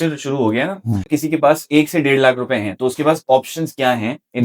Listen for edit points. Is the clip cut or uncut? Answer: cut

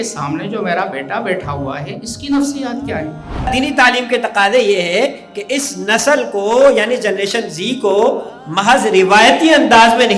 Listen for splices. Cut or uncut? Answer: cut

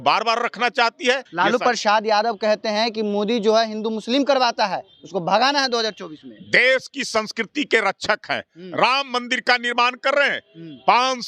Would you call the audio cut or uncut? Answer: cut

